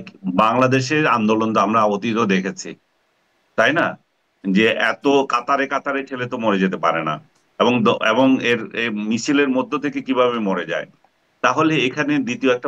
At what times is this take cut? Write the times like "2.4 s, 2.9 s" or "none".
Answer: none